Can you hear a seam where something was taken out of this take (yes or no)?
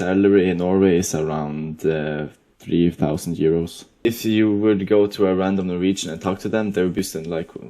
yes